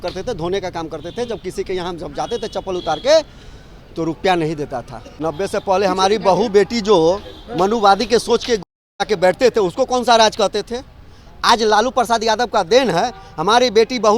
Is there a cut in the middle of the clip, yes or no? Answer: yes